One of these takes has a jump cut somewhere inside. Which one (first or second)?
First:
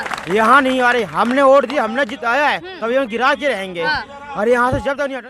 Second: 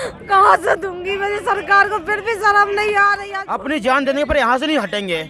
second